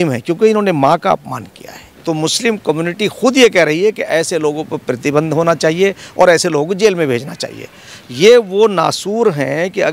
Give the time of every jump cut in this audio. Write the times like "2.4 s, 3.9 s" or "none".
1.9 s